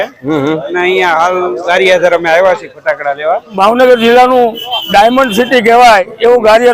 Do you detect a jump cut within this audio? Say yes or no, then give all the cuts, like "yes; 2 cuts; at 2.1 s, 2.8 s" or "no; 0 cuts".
yes; 1 cut; at 3.5 s